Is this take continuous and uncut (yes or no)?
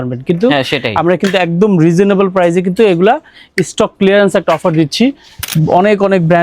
no